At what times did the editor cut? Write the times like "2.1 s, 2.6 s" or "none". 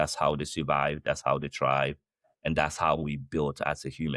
none